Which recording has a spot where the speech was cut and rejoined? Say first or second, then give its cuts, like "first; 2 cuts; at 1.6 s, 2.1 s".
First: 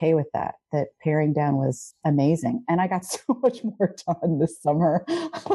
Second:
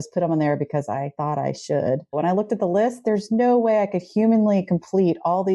second; 2 cuts; at 1.1 s, 2.1 s